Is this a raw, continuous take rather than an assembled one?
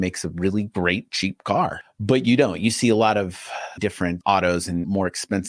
no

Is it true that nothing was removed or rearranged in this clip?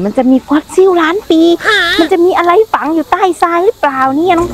yes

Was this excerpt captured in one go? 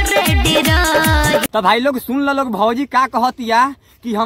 no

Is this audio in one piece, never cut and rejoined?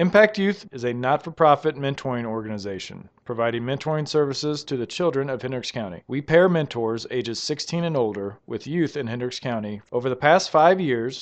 yes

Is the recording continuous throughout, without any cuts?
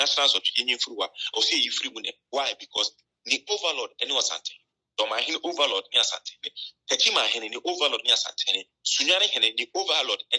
yes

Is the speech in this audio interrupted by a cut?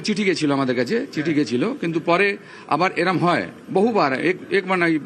no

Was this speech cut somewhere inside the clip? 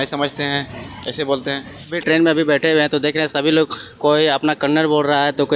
yes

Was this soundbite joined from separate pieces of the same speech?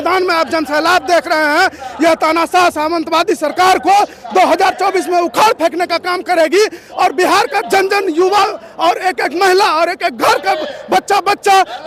no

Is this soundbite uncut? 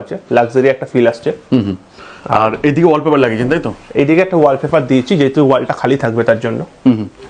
yes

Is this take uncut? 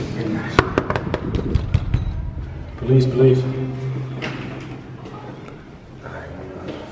yes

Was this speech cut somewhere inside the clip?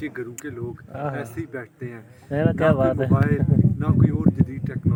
no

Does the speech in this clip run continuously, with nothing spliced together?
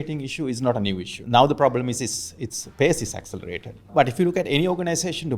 no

